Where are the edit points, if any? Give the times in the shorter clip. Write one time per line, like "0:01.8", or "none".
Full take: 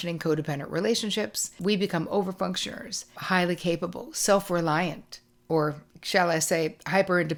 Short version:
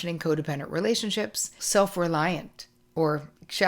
0:01.5